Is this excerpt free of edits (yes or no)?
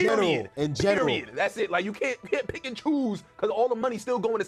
yes